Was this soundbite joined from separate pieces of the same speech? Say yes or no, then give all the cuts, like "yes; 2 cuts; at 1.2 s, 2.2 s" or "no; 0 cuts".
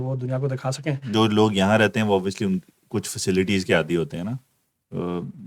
yes; 1 cut; at 1.1 s